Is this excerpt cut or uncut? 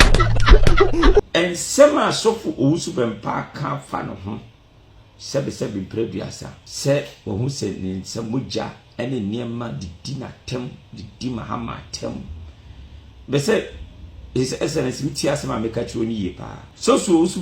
cut